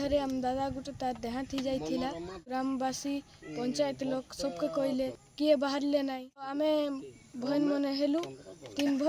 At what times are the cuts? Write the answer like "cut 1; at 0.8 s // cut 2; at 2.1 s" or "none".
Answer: cut 1; at 2.5 s // cut 2; at 5.2 s // cut 3; at 6.5 s